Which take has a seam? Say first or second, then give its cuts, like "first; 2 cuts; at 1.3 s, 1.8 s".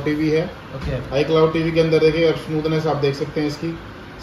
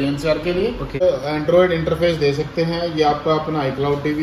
second; 1 cut; at 1.0 s